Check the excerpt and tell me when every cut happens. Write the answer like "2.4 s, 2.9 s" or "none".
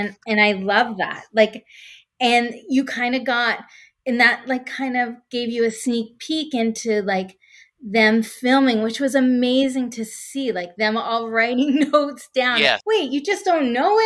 12.8 s